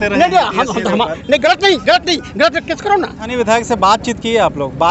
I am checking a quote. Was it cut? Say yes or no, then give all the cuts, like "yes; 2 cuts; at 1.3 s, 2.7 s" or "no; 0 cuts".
yes; 1 cut; at 3.2 s